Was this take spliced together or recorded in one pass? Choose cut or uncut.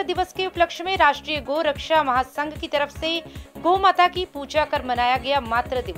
uncut